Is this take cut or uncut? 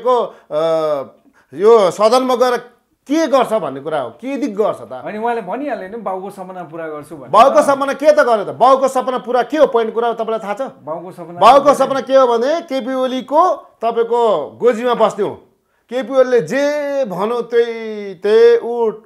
uncut